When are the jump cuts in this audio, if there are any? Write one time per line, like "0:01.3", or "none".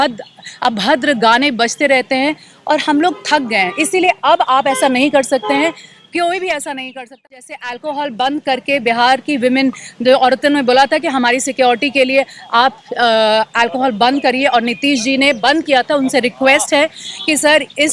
0:07.2